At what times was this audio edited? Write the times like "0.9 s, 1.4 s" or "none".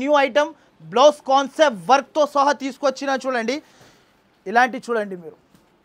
none